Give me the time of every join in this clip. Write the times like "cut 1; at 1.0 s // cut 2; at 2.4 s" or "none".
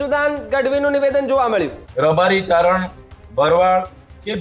cut 1; at 1.8 s